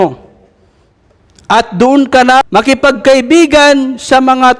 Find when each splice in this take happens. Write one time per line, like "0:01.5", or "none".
0:02.5